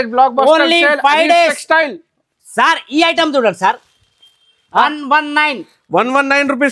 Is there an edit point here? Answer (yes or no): yes